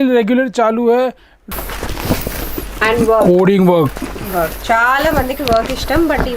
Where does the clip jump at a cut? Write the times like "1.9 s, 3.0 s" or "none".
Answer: 1.3 s